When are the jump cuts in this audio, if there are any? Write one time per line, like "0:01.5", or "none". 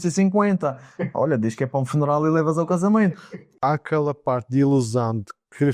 0:03.5